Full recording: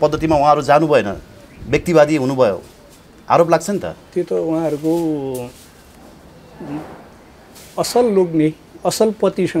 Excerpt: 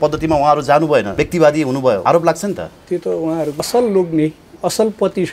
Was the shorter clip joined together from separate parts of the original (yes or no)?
yes